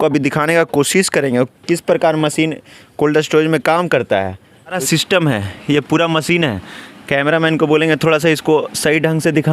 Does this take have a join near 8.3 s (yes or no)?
no